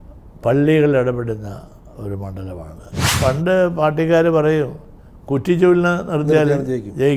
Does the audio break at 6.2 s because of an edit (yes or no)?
no